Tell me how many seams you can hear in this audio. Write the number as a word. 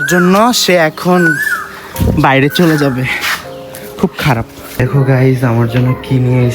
one